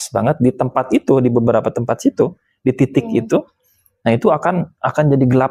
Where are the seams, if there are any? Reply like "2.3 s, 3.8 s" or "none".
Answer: none